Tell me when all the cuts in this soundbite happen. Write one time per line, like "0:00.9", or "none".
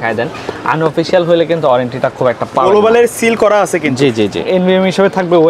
0:04.5